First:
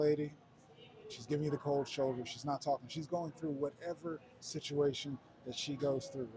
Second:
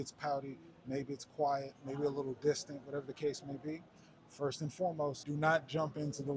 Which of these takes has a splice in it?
second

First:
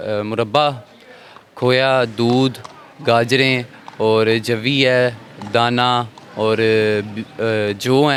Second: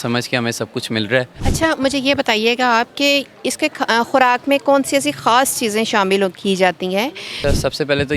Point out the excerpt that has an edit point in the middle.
second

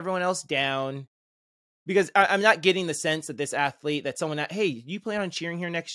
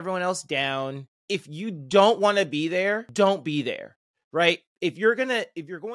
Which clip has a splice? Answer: second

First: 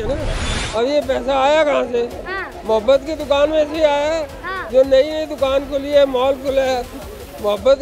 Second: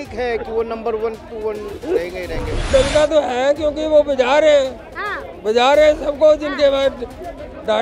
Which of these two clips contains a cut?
second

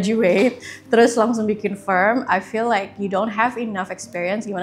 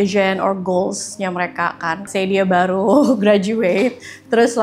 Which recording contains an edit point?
second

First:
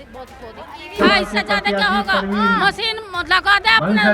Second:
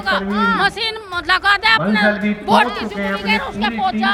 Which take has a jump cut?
first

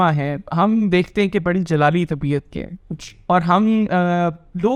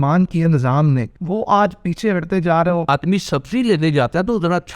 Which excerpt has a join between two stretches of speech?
second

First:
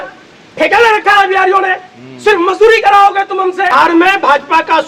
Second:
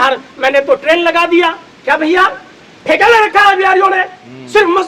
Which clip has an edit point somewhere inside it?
first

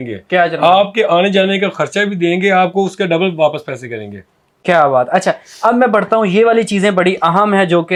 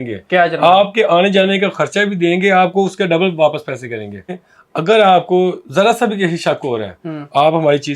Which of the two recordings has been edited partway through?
second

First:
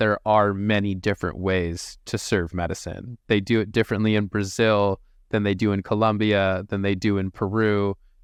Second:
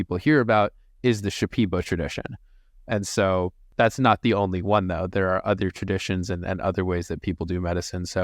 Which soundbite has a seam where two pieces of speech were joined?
second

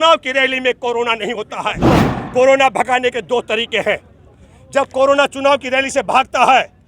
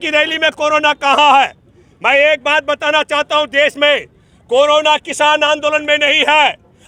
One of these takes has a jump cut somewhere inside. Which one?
first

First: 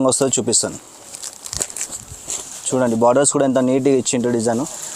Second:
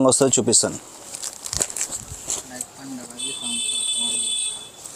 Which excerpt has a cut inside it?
first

